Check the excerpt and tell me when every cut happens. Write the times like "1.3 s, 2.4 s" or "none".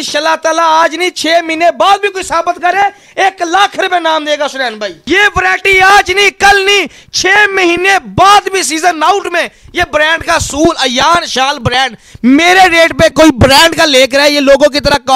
4.9 s